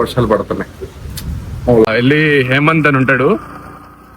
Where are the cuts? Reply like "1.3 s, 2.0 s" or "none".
1.9 s